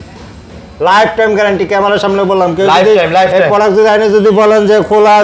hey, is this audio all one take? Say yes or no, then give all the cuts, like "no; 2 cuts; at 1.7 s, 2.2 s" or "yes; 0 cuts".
yes; 0 cuts